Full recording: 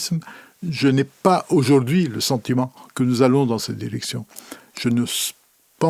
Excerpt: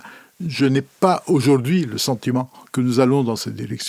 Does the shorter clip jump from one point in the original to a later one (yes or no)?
no